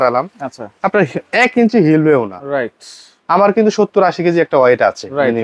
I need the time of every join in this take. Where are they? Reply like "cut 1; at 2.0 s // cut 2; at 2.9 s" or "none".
none